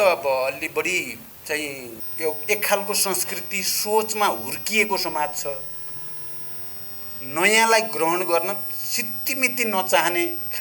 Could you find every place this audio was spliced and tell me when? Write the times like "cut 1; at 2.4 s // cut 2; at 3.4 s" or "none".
cut 1; at 2.0 s